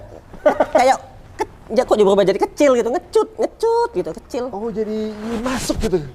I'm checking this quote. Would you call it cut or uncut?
uncut